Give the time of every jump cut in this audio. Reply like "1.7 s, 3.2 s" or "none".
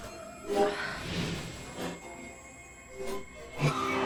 none